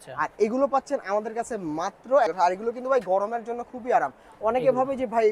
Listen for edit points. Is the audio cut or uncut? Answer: cut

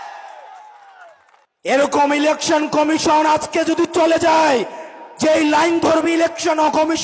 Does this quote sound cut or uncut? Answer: cut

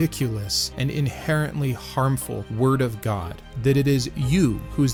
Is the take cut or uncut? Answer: uncut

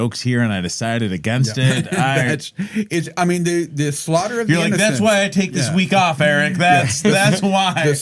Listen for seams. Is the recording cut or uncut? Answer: uncut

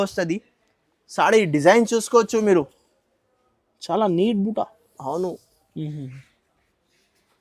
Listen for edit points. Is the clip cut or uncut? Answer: uncut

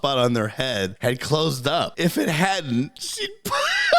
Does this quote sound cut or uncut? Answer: cut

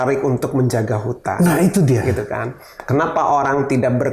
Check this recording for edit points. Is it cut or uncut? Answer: uncut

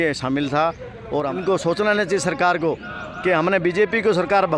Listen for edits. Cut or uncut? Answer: cut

